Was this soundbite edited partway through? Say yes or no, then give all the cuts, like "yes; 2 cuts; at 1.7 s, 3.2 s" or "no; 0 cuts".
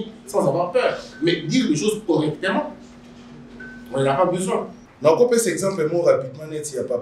yes; 1 cut; at 4.8 s